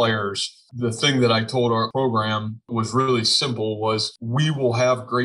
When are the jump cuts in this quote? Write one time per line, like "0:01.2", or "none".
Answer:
0:04.2